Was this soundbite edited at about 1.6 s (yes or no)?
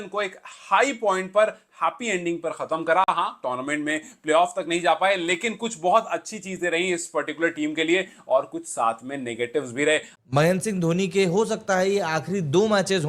no